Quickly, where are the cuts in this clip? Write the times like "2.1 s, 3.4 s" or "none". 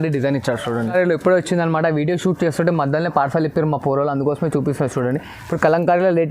0.9 s